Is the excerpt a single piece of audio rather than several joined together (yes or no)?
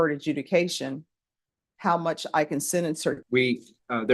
no